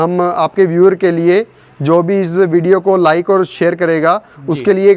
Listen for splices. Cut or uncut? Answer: uncut